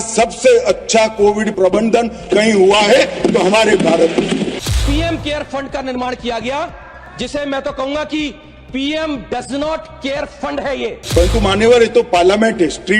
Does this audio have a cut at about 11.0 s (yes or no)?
yes